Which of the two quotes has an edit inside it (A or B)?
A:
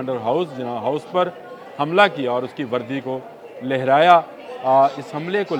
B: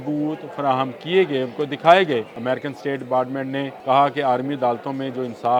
B